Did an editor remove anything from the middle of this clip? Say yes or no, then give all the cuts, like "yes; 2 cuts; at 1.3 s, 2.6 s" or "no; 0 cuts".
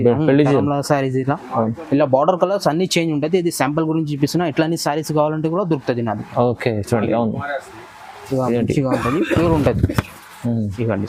no; 0 cuts